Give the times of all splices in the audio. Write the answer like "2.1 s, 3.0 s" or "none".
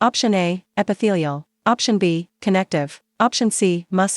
none